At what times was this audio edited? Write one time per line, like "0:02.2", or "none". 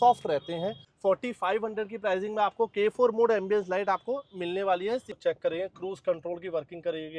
0:00.9
0:05.1